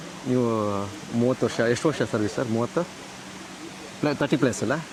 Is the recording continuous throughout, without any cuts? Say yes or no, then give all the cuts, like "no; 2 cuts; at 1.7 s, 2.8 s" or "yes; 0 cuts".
yes; 0 cuts